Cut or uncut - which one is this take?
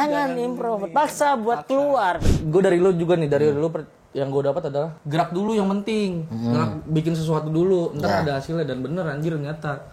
cut